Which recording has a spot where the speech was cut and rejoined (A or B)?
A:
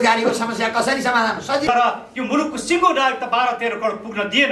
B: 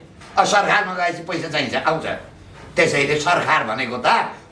A